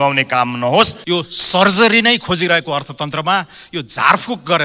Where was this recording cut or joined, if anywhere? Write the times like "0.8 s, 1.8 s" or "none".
1.0 s